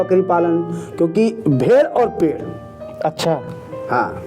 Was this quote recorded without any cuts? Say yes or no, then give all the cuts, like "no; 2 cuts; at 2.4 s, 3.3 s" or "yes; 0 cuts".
yes; 0 cuts